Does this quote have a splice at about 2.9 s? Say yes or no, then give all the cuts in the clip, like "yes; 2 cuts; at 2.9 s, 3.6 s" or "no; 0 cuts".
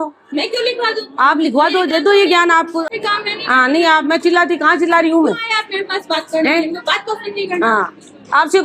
yes; 1 cut; at 2.9 s